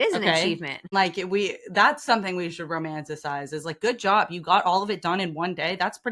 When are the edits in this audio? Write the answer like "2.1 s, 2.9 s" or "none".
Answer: 0.9 s